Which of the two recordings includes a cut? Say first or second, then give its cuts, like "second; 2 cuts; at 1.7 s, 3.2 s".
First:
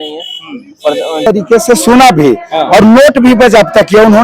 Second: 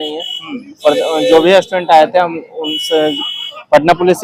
first; 1 cut; at 1.2 s